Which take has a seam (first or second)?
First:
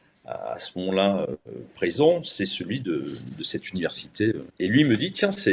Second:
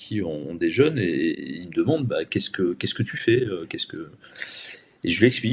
first